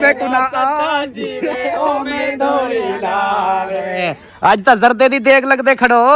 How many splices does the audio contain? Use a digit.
1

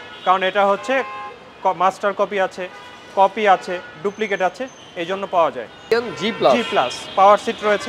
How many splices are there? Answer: 1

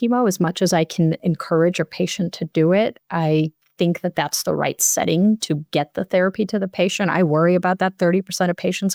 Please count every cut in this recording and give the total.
0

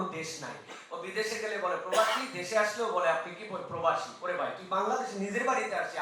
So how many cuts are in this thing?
0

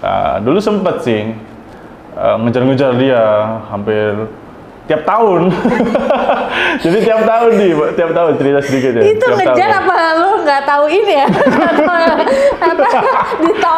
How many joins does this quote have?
0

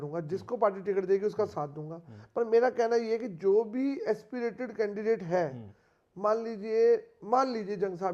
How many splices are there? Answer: 0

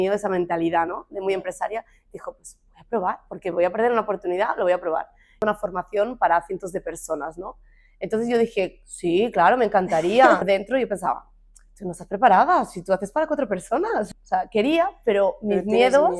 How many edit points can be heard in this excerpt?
3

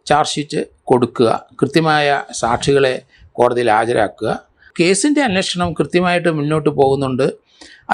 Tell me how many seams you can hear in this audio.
1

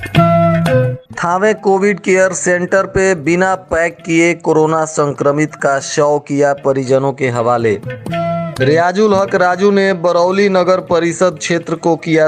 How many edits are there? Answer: 1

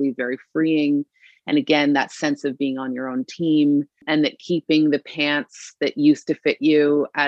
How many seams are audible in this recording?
1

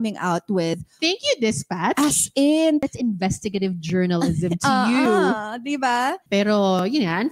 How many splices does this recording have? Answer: 2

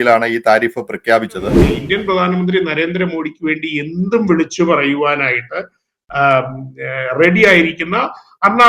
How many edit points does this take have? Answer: 1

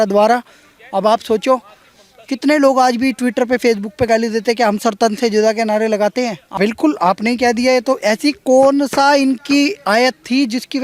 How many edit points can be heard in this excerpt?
1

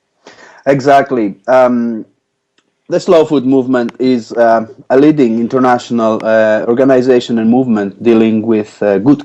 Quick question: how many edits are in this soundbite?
0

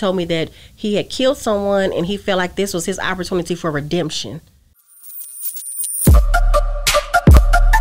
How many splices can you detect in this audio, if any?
1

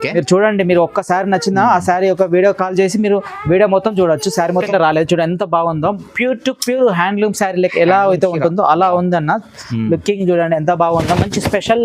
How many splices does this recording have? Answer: 1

